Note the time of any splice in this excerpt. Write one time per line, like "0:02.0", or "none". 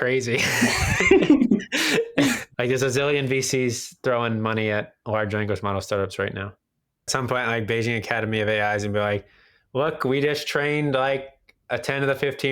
0:02.5
0:07.1